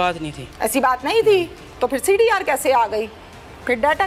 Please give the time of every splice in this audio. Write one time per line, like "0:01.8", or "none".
none